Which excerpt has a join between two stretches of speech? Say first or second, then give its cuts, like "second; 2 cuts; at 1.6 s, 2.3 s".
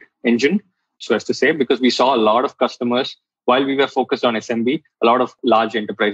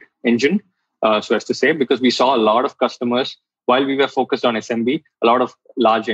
first; 2 cuts; at 1.0 s, 5.3 s